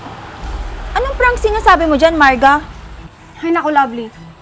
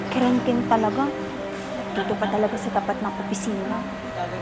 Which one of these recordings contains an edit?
first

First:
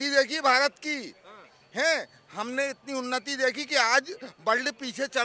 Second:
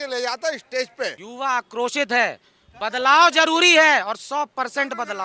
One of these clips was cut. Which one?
second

